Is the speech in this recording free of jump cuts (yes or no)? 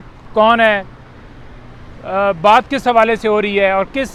yes